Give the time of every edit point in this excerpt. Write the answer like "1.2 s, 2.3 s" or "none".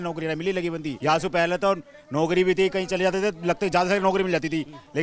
0.9 s